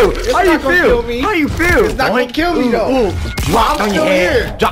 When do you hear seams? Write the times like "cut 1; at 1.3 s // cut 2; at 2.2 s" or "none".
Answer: none